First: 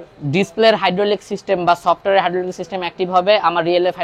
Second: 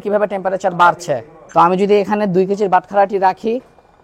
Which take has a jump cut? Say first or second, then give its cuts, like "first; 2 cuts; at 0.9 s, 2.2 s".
second; 1 cut; at 1.3 s